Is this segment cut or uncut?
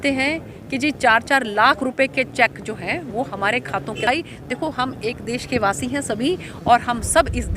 cut